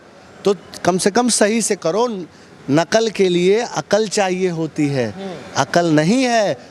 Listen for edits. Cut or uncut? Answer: uncut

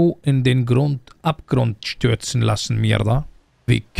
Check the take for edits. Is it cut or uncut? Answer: uncut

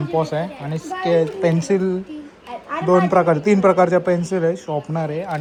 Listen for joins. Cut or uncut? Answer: uncut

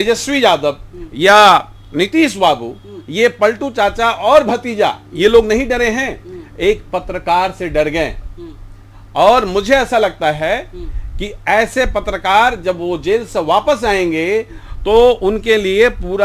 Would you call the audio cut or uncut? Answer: uncut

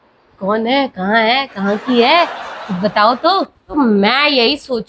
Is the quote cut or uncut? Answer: cut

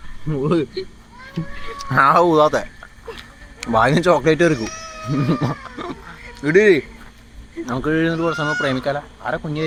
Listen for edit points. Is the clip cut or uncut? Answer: uncut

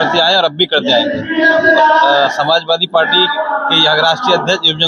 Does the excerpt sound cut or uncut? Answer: uncut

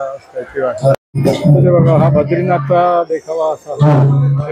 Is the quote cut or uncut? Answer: cut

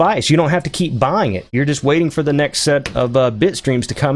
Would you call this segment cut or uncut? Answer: uncut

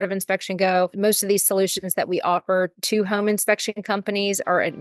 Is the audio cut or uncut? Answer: cut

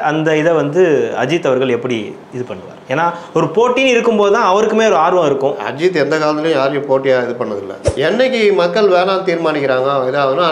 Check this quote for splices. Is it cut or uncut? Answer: cut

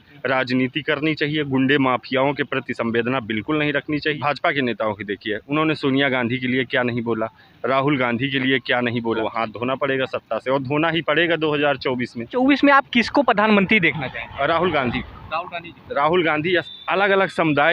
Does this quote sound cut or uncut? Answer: cut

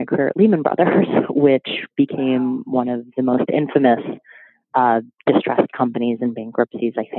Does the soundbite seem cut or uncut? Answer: uncut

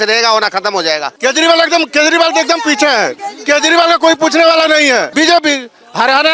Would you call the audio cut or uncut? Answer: cut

